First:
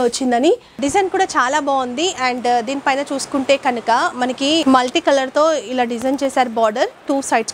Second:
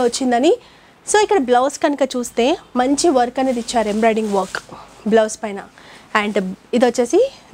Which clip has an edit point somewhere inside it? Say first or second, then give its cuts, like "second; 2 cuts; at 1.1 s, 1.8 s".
first; 2 cuts; at 0.8 s, 4.6 s